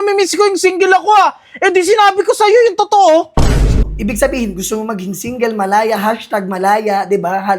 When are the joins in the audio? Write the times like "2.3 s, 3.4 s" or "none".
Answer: 3.8 s